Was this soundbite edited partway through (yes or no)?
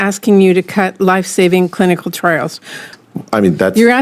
yes